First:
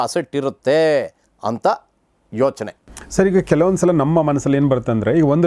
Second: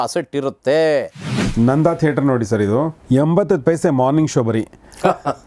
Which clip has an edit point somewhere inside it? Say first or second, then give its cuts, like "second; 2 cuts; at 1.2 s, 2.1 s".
second; 1 cut; at 1.4 s